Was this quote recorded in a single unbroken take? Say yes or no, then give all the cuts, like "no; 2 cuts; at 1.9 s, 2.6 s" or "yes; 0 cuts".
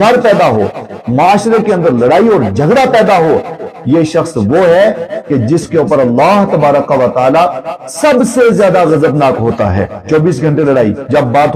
no; 1 cut; at 9.9 s